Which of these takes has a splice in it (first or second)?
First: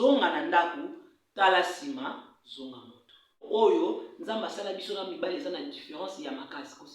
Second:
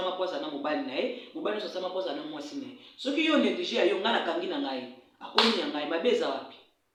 first